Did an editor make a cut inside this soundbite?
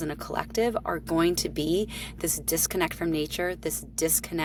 no; 0 cuts

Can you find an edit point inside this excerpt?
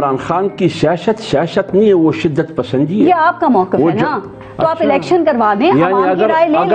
no; 0 cuts

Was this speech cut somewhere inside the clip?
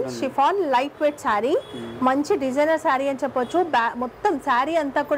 no; 0 cuts

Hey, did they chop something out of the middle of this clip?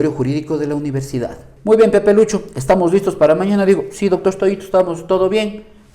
yes; 1 cut; at 1.5 s

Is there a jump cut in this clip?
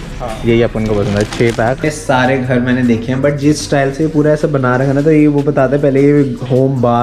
yes; 1 cut; at 1.8 s

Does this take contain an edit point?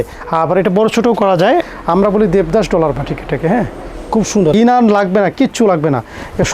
yes; 2 cuts; at 1.6 s, 4.5 s

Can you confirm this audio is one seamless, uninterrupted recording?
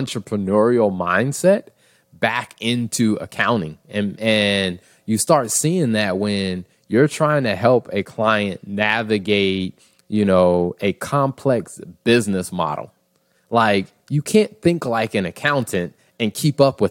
yes; 0 cuts

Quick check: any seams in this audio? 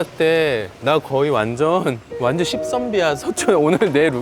no; 0 cuts

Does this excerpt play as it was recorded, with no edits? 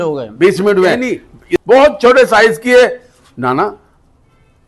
no; 1 cut; at 1.6 s

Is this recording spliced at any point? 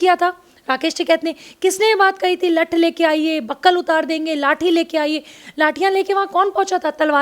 no; 0 cuts

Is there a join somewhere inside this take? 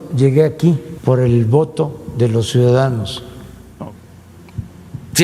yes; 2 cuts; at 0.9 s, 3.6 s

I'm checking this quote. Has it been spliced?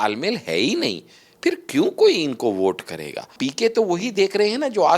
yes; 1 cut; at 3.3 s

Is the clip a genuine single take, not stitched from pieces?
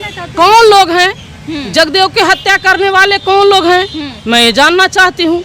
yes; 0 cuts

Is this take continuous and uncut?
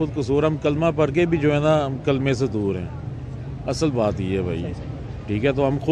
yes; 0 cuts

